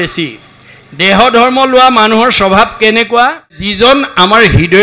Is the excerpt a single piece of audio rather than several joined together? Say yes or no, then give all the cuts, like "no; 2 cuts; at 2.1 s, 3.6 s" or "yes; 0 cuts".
no; 1 cut; at 3.7 s